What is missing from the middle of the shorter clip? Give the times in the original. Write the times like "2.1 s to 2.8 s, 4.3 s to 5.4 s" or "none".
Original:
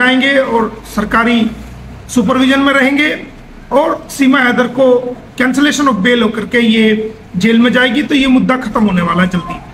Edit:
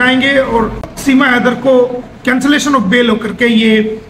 0.9 s to 4.0 s